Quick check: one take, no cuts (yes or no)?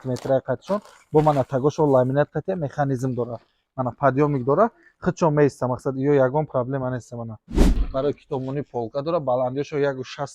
no